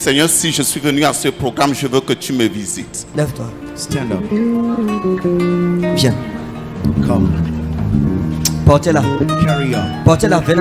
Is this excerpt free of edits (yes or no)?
no